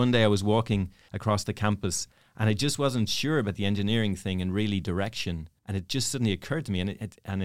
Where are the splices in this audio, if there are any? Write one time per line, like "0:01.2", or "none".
0:01.0
0:05.5